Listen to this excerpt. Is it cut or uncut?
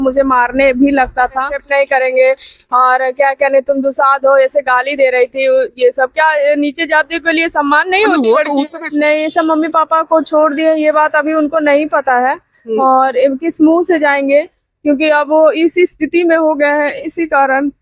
cut